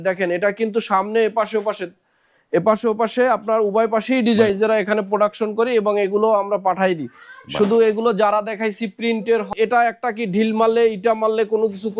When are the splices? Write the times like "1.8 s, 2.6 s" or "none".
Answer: 4.5 s, 9.5 s

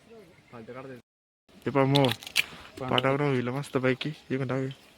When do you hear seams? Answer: 1.0 s

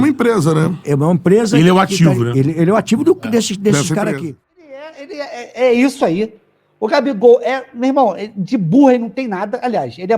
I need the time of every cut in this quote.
4.9 s

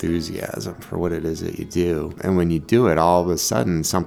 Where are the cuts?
2.2 s

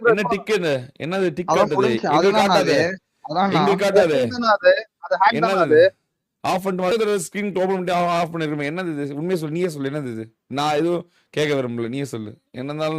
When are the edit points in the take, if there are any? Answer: 6.9 s

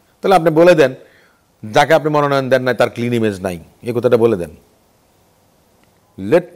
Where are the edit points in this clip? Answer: none

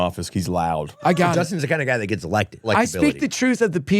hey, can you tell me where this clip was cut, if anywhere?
0.9 s, 2.7 s

